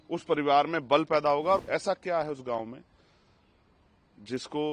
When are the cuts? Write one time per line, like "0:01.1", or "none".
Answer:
0:01.6